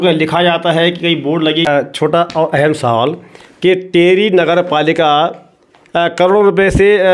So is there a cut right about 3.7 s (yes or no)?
no